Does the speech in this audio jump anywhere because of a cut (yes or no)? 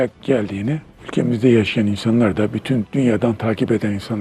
no